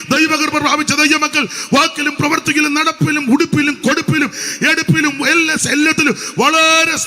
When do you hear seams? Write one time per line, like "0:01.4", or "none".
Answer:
none